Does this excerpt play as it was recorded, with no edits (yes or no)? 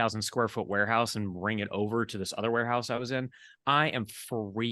yes